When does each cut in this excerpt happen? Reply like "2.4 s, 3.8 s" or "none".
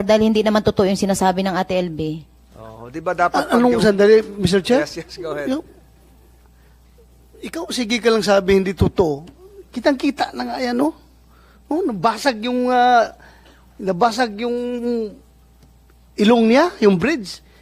none